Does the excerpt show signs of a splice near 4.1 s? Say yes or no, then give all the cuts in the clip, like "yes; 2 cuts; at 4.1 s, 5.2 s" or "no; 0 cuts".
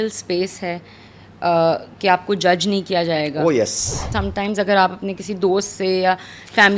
yes; 1 cut; at 4.1 s